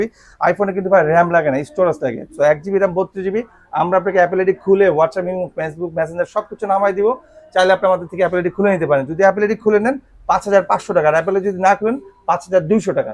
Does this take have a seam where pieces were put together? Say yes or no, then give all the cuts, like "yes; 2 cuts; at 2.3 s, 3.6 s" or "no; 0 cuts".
no; 0 cuts